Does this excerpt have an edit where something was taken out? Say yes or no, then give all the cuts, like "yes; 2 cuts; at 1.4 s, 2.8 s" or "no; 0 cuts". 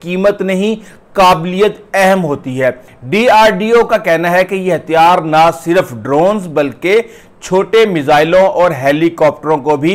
yes; 1 cut; at 2.9 s